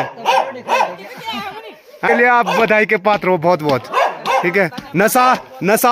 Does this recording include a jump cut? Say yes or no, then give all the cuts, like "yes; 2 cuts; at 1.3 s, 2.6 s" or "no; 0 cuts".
yes; 1 cut; at 2.1 s